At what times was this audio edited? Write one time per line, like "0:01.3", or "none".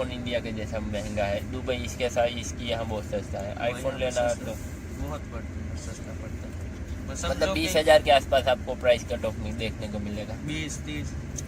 none